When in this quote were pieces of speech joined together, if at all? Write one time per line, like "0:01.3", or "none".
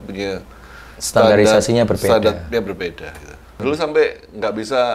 0:03.6